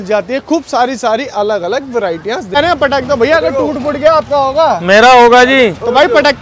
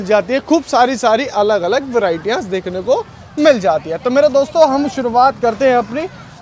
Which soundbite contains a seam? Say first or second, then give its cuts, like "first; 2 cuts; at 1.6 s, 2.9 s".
first; 1 cut; at 2.6 s